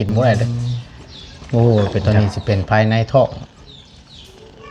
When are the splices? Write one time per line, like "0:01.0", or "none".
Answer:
0:02.0